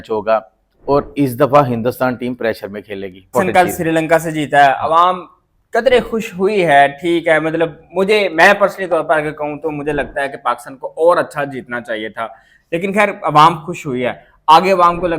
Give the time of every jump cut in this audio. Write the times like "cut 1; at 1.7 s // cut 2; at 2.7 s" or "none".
cut 1; at 3.3 s